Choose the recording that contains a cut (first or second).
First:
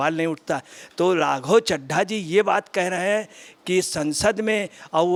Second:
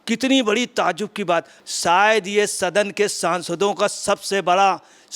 second